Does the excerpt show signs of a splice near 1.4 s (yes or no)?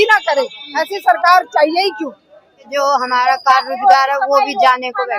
no